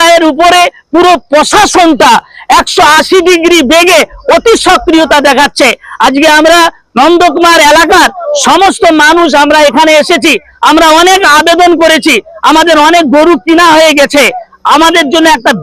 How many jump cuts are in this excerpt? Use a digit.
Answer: 0